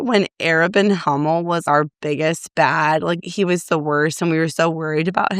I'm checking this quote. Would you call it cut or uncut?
cut